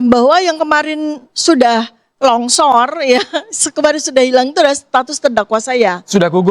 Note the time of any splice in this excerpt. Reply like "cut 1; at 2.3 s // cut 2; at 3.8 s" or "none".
none